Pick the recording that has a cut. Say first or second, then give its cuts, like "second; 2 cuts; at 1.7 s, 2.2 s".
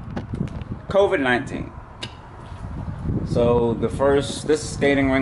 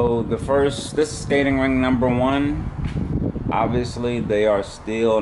first; 1 cut; at 1.9 s